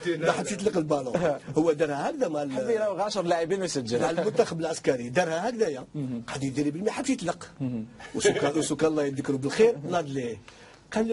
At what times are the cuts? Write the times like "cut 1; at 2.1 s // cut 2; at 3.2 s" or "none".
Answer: none